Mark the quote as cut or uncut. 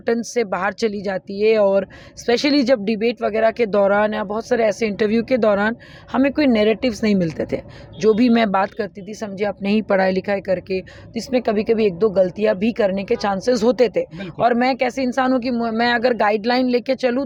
uncut